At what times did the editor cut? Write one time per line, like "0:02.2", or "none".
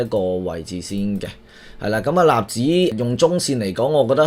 0:02.9